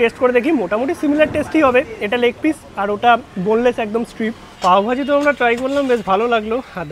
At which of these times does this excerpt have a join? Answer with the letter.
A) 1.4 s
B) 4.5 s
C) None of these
B